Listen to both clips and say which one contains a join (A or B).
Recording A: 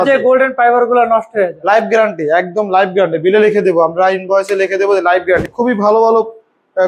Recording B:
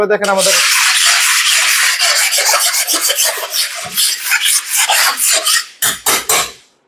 A